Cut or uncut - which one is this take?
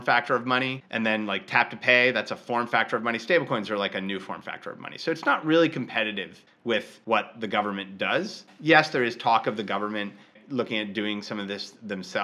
cut